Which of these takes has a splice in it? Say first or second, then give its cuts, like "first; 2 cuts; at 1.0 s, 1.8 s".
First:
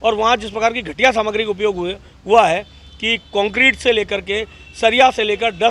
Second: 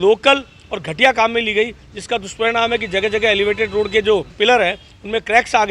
second; 1 cut; at 4.3 s